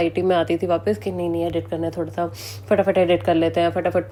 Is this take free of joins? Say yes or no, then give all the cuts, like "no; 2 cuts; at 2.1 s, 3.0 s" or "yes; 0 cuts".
yes; 0 cuts